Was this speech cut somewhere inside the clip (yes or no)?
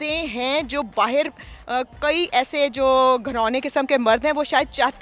no